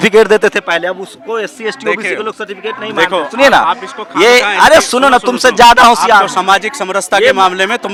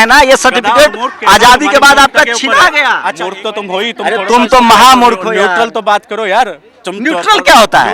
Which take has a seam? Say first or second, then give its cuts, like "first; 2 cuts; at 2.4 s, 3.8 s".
second; 1 cut; at 3.1 s